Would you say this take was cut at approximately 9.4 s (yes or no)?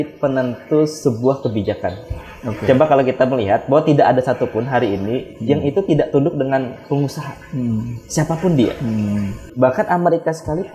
yes